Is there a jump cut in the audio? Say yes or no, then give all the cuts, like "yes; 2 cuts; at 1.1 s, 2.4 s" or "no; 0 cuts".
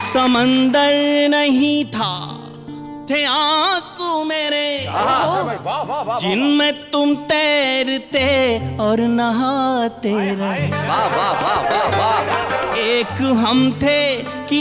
no; 0 cuts